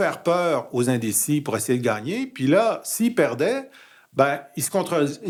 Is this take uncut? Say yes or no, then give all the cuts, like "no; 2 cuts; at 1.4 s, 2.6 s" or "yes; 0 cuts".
yes; 0 cuts